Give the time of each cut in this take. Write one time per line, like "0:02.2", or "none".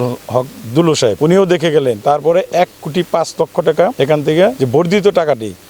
0:01.2
0:04.3